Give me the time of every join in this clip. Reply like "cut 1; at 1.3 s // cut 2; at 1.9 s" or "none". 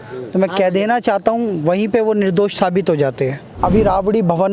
cut 1; at 3.5 s